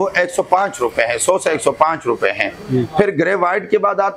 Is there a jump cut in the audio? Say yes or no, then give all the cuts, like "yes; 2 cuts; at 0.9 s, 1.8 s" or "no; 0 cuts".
no; 0 cuts